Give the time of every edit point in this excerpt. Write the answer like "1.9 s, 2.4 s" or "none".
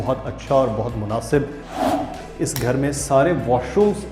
1.8 s

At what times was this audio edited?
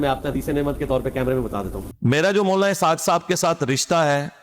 1.8 s

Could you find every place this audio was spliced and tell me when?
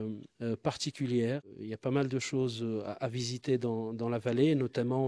none

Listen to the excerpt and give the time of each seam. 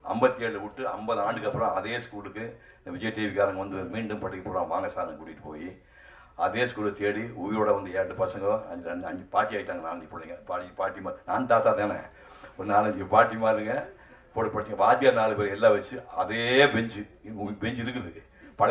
none

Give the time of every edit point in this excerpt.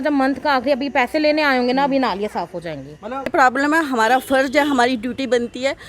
3.3 s

